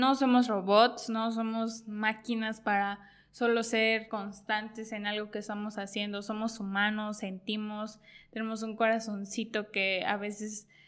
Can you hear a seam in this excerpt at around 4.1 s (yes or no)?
yes